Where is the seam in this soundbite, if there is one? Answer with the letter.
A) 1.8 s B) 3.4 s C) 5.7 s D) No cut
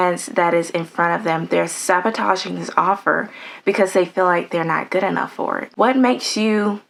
D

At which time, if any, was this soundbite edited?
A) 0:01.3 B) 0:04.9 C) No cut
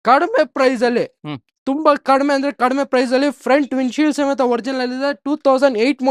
C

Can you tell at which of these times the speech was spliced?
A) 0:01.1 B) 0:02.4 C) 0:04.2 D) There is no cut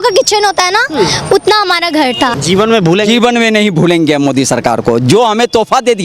B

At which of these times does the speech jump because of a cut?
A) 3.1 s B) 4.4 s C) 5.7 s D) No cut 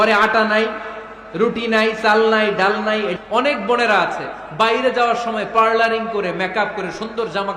A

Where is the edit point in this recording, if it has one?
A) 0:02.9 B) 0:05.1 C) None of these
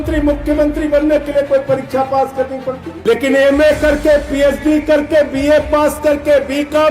A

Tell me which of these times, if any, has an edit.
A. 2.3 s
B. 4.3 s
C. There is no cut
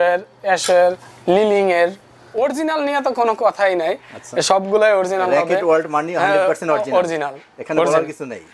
A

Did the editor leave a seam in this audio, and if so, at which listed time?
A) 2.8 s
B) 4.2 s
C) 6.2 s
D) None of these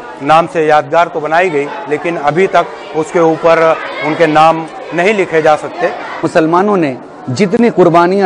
C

